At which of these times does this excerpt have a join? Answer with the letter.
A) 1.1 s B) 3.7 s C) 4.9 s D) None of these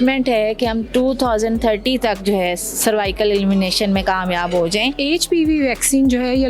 C